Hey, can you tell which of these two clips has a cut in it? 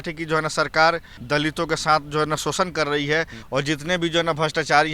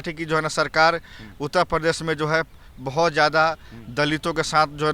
first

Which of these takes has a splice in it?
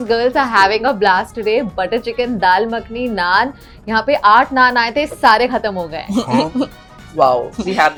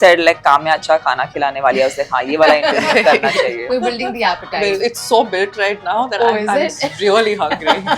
second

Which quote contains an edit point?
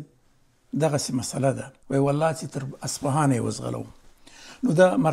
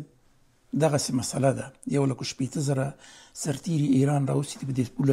first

